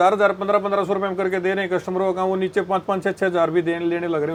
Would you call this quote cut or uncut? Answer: uncut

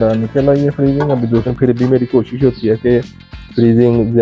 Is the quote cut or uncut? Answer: cut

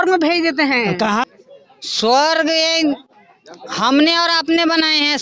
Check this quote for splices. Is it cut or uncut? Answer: cut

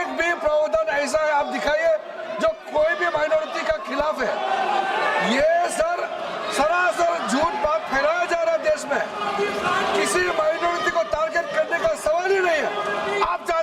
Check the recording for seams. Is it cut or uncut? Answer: uncut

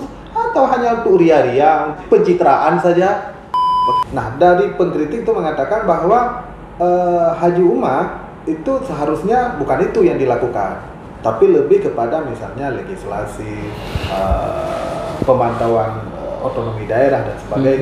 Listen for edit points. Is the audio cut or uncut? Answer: cut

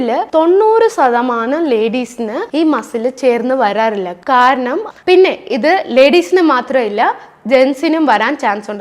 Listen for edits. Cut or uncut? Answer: cut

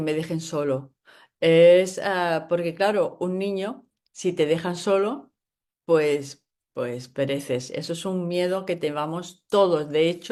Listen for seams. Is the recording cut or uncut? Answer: uncut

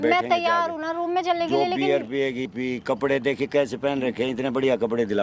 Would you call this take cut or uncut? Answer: cut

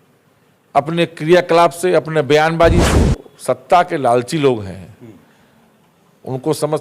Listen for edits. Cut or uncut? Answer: cut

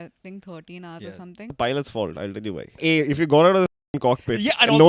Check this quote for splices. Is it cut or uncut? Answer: cut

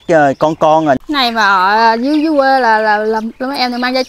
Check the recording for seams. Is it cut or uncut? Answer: cut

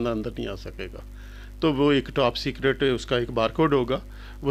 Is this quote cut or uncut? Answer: uncut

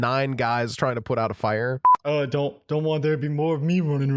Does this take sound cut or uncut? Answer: cut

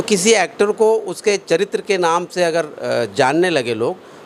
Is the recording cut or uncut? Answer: uncut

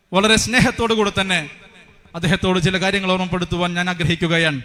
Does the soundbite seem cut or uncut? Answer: uncut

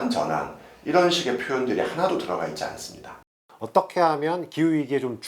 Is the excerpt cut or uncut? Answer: cut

